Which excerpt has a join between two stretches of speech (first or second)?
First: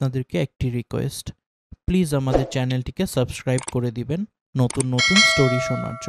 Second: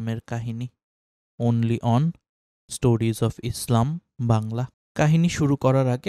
second